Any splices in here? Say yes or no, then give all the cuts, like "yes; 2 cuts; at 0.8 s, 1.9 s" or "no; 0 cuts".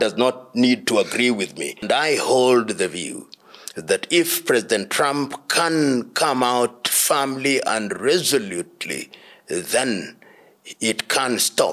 yes; 1 cut; at 1.8 s